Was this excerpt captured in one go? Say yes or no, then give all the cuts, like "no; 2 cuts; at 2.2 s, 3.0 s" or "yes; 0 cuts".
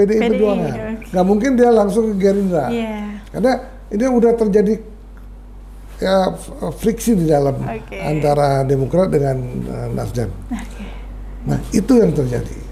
yes; 0 cuts